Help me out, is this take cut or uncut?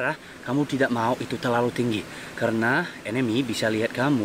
uncut